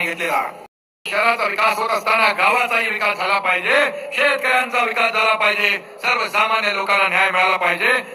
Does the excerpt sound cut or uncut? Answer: cut